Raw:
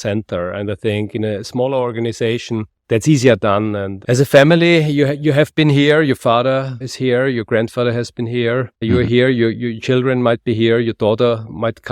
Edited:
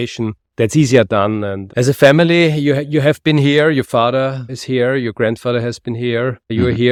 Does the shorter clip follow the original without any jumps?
yes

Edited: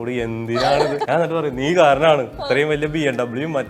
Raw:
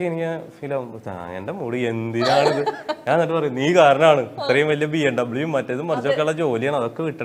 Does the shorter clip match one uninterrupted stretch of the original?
no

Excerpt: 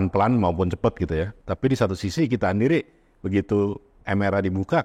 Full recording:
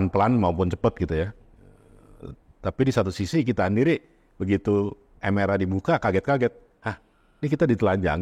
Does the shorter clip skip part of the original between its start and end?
yes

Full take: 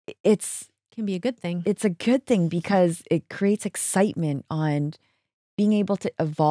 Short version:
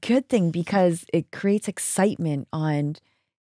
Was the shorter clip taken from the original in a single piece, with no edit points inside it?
yes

